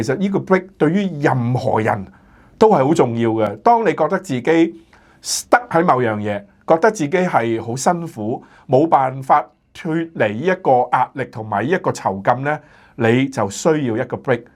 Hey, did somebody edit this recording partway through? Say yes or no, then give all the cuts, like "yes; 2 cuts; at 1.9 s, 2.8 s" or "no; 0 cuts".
no; 0 cuts